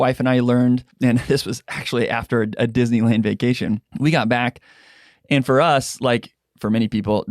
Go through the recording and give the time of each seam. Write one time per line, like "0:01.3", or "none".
0:00.9
0:03.9